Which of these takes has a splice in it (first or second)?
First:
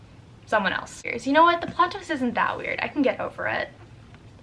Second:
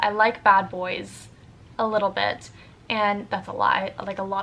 first